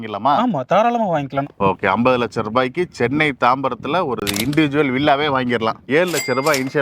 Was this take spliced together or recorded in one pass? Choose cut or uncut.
cut